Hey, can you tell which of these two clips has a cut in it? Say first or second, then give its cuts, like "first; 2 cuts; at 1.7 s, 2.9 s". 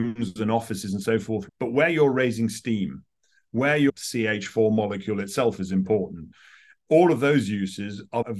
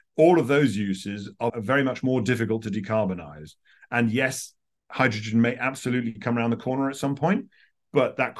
first; 2 cuts; at 1.4 s, 3.9 s